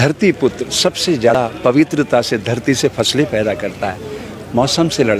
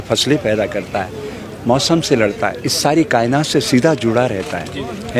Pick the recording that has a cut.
first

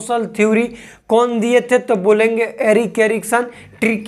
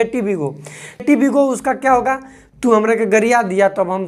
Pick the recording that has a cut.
second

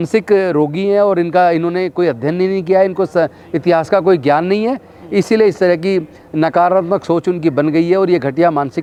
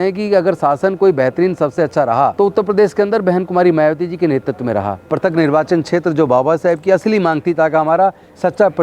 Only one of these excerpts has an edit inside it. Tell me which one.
second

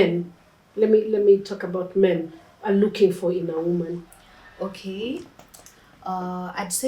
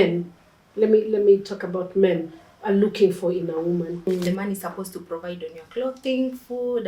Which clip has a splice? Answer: second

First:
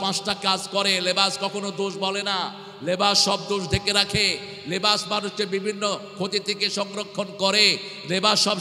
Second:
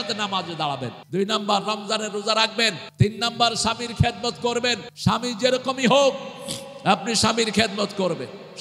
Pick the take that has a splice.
second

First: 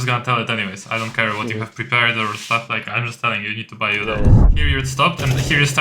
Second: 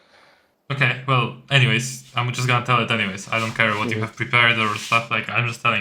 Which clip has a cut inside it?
first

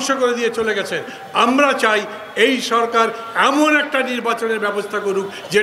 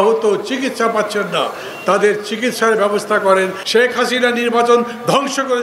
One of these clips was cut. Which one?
second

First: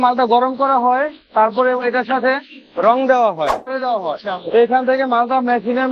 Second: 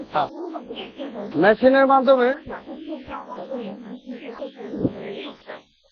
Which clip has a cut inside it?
first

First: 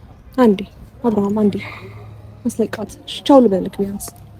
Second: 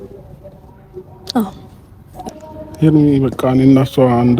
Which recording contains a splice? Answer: second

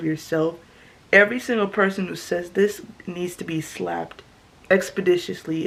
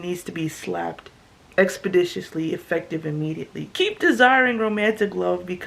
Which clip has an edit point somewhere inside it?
second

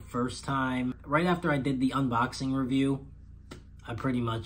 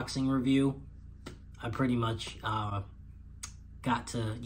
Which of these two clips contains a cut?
first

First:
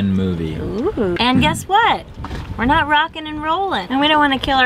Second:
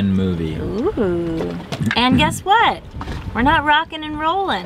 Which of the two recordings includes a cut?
first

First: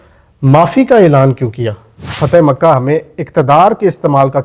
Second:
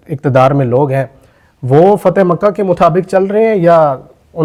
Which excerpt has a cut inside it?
first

